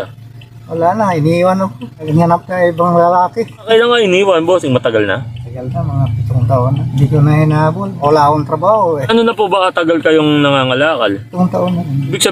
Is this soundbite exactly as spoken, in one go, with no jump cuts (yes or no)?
yes